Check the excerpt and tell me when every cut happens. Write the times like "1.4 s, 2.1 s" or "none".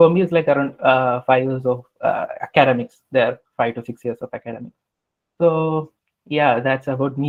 none